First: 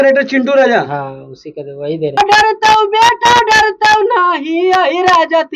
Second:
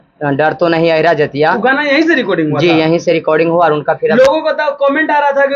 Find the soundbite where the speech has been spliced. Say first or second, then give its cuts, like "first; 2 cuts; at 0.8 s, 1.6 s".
first; 1 cut; at 2.2 s